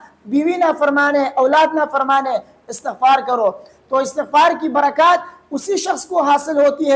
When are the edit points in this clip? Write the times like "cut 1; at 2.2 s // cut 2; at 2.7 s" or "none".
cut 1; at 3.6 s